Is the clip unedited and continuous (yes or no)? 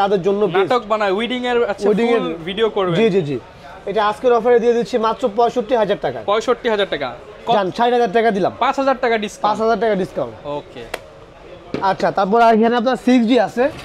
yes